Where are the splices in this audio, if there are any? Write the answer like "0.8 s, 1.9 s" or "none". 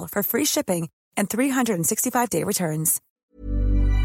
3.0 s